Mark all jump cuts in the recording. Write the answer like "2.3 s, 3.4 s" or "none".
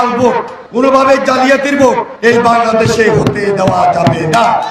0.8 s, 2.1 s